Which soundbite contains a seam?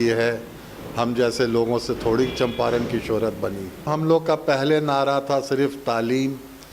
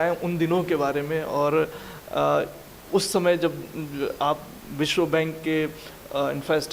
first; 1 cut; at 3.9 s

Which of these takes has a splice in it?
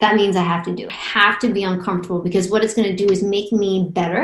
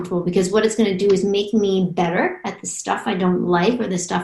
first; 1 cut; at 1.0 s

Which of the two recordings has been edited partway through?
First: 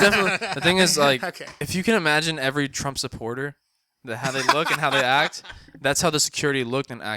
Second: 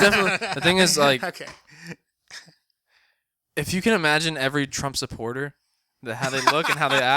first; 1 cut; at 1.5 s

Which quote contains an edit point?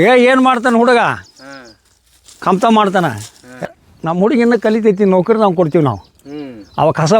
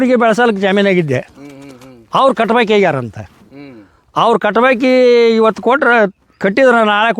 first; 1 cut; at 3.7 s

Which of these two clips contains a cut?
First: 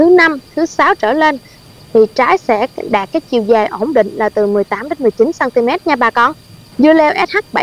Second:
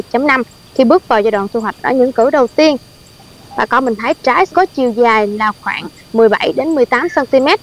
first; 2 cuts; at 1.5 s, 6.7 s

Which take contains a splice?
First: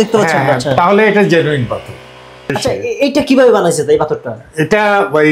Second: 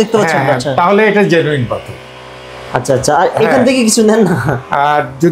first; 1 cut; at 2.6 s

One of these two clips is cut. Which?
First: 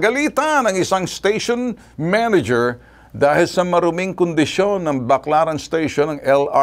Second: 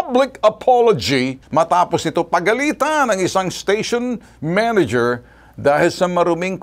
second; 1 cut; at 1.4 s

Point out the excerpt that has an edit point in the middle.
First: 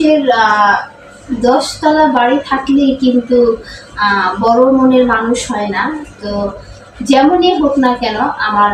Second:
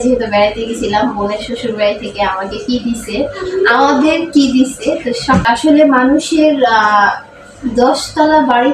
second; 1 cut; at 5.4 s

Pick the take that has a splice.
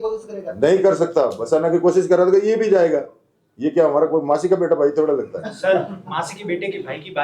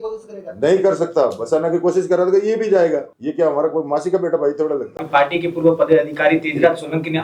second; 2 cuts; at 3.2 s, 5.0 s

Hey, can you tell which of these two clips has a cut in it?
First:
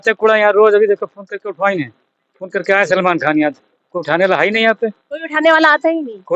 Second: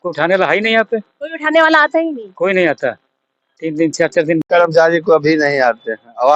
second; 1 cut; at 4.4 s

